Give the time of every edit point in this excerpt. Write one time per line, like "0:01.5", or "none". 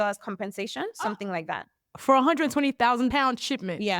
0:03.1